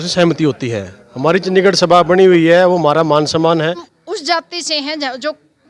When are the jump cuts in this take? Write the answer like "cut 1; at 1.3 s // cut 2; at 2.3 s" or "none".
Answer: cut 1; at 3.9 s